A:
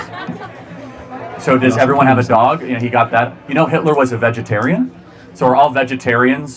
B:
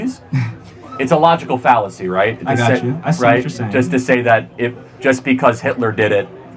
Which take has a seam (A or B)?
B